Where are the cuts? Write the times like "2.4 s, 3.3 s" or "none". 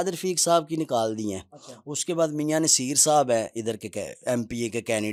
none